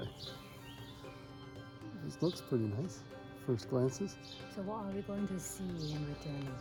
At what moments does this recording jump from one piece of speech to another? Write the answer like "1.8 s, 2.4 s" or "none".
none